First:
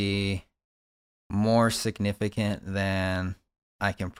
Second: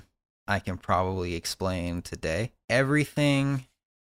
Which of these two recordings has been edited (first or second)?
second